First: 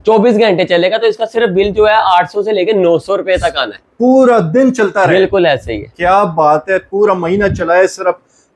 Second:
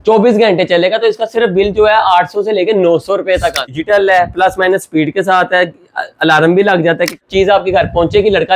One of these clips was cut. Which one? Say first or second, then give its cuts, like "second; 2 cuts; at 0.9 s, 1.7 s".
second; 2 cuts; at 3.7 s, 7.2 s